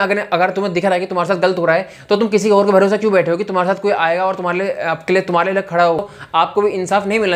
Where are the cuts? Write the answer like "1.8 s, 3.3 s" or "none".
6.0 s